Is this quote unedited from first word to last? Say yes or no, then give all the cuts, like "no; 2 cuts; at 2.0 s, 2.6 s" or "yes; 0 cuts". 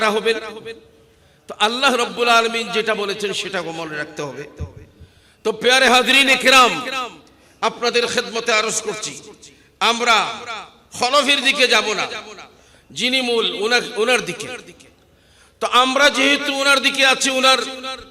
yes; 0 cuts